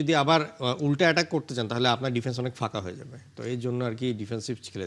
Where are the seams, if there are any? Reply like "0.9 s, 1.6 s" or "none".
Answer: none